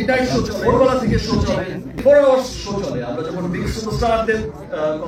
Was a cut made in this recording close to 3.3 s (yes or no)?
no